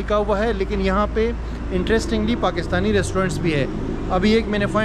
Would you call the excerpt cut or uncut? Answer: uncut